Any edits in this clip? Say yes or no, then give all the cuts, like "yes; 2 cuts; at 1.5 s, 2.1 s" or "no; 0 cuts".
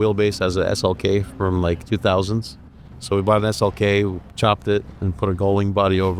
no; 0 cuts